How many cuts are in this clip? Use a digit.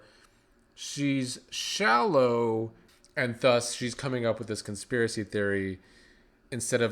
1